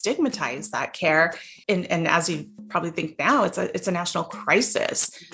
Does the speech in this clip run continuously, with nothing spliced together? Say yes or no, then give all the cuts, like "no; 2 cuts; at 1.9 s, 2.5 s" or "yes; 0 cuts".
no; 1 cut; at 1.5 s